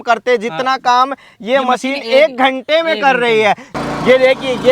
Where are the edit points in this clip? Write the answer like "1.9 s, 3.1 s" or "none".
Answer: 3.7 s